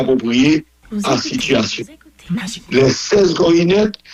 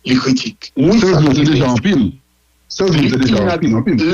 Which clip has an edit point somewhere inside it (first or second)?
second